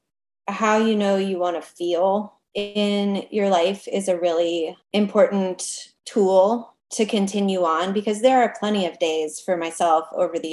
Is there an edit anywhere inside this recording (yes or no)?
yes